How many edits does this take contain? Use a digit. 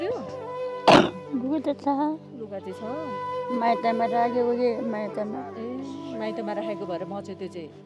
0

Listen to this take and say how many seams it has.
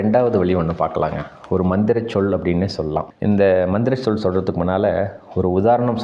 0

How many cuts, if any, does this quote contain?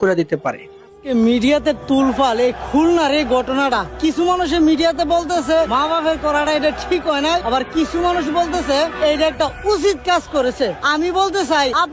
1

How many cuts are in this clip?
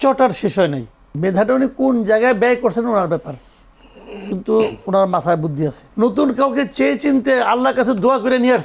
2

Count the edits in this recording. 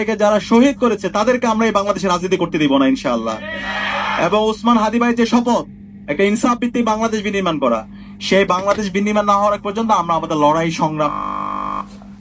0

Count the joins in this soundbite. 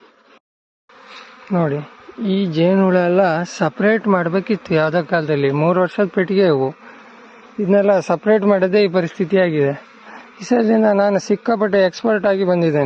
0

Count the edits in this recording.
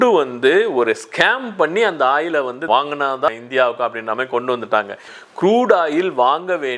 1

